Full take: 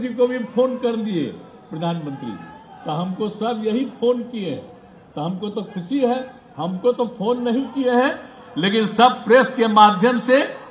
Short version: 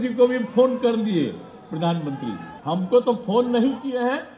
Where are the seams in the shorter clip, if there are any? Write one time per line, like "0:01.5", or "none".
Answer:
0:02.5